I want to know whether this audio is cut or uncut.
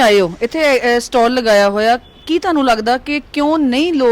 uncut